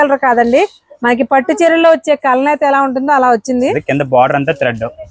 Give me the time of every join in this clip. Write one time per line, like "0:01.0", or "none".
0:03.8